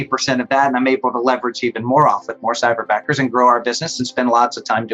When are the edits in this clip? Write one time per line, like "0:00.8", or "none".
none

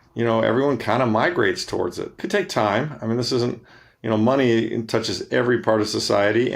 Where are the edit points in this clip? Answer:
0:02.2

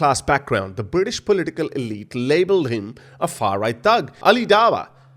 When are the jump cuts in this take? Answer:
0:04.1

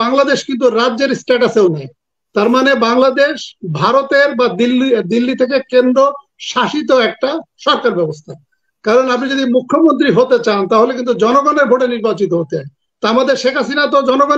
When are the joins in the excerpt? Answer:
none

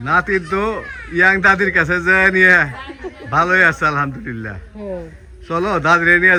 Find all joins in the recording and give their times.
none

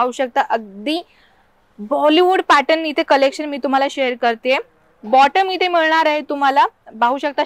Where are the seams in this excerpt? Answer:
none

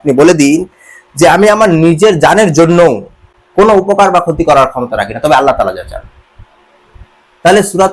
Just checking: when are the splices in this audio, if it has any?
none

